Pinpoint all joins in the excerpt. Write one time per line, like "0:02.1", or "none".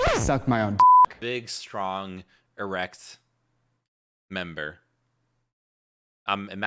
0:01.3